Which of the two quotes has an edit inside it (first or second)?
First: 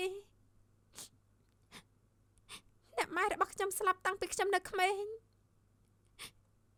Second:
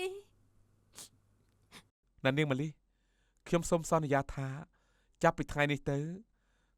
second